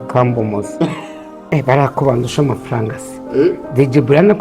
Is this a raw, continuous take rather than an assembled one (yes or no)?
no